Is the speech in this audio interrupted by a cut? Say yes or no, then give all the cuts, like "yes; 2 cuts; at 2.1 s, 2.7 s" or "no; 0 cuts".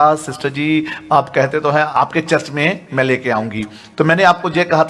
yes; 1 cut; at 1.9 s